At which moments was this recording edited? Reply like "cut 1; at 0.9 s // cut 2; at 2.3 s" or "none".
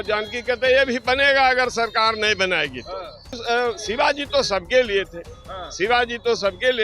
cut 1; at 3.4 s